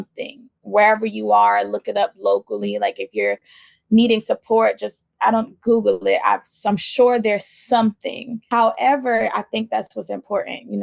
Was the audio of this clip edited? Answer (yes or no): yes